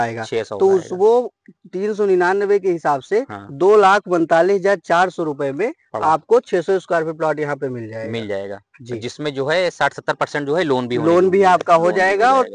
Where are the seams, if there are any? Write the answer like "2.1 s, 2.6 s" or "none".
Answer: none